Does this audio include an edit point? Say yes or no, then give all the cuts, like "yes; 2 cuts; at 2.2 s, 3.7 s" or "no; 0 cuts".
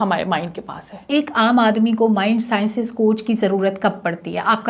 yes; 1 cut; at 1.0 s